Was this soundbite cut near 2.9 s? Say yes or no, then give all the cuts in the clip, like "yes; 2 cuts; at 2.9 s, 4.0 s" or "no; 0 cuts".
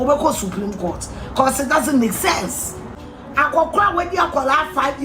yes; 1 cut; at 2.9 s